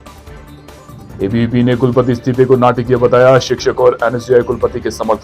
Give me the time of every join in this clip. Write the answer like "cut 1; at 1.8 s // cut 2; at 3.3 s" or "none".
cut 1; at 1.0 s